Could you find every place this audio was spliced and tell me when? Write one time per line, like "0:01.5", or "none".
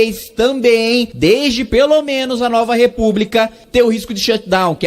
0:01.1
0:03.6